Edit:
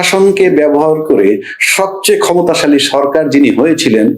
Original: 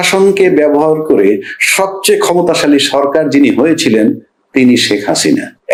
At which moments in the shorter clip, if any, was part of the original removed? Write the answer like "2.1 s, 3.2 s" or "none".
none

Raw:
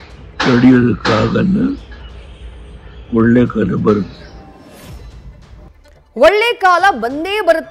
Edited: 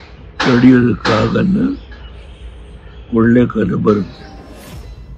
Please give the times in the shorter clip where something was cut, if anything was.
4.2 s

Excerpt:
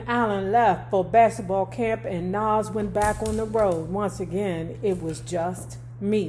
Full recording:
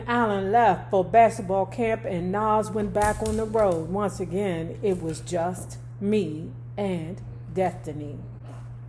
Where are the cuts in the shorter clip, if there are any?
none

